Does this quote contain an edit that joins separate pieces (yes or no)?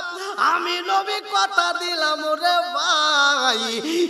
no